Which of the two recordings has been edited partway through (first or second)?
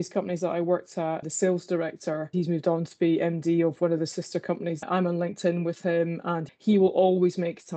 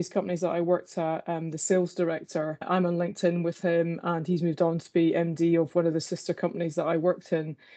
first